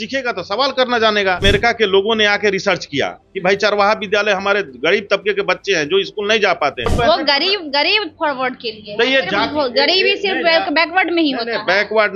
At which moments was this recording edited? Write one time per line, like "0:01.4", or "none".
0:01.4
0:06.9